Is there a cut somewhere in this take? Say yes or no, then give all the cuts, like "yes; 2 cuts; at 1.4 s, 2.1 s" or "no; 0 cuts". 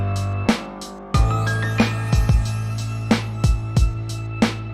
yes; 1 cut; at 1.0 s